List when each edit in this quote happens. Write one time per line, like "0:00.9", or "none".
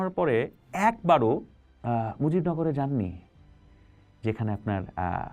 none